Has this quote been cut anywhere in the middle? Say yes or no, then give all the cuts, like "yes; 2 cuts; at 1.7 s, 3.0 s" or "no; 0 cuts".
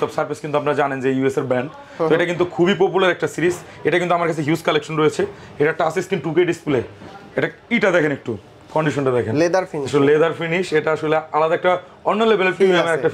no; 0 cuts